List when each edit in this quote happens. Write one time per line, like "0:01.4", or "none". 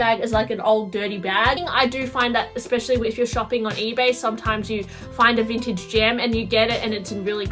0:01.6